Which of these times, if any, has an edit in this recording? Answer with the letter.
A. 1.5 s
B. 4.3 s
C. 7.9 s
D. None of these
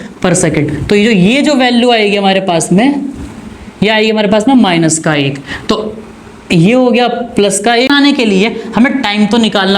C